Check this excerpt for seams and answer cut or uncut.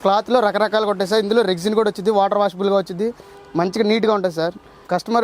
uncut